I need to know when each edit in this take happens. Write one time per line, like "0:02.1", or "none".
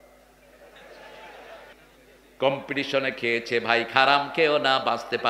0:01.8